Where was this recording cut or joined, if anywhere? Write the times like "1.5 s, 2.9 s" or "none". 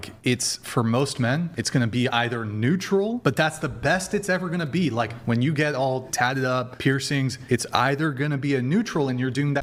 none